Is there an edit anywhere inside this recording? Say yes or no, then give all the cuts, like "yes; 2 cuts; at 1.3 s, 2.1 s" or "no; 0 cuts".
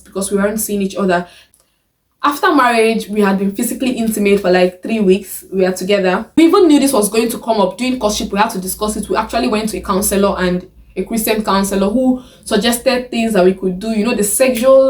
yes; 2 cuts; at 1.4 s, 6.4 s